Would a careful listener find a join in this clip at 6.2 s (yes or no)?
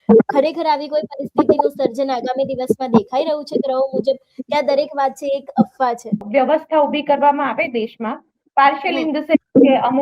yes